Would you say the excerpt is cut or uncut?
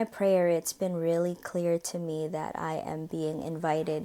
uncut